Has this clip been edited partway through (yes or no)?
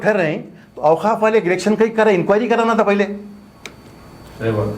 no